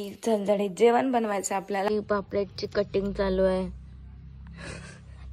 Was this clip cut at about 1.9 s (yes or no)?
yes